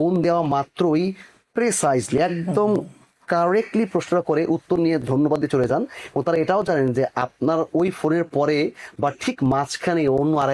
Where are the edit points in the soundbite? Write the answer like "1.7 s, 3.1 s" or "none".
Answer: none